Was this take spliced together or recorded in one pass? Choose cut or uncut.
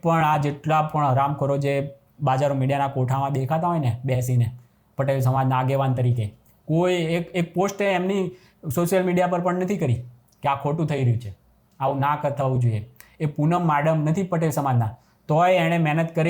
uncut